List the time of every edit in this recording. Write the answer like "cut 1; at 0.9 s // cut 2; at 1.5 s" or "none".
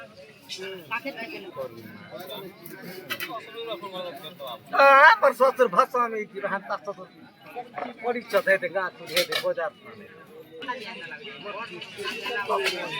none